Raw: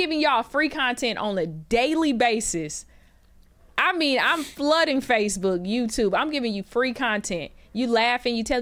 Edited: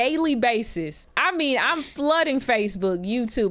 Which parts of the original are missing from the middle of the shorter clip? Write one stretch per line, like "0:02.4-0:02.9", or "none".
0:02.8-0:03.6